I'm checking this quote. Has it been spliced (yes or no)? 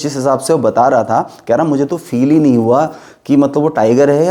no